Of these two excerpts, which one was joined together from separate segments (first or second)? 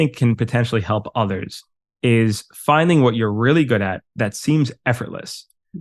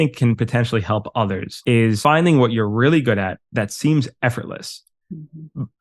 second